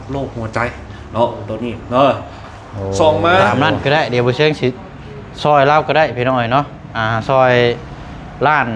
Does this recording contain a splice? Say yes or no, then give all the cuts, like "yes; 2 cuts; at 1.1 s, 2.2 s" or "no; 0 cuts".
yes; 1 cut; at 3.5 s